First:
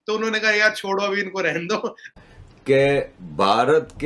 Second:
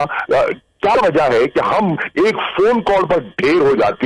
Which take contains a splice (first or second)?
first